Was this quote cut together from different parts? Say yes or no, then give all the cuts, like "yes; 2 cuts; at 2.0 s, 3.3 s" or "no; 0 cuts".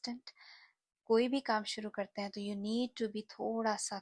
no; 0 cuts